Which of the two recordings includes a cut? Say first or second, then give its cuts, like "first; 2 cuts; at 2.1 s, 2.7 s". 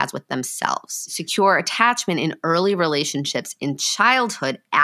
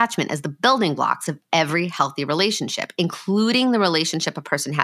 first; 1 cut; at 1.2 s